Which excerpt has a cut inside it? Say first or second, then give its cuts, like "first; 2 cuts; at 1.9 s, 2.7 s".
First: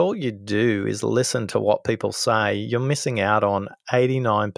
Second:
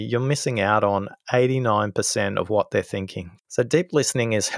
second; 1 cut; at 3.3 s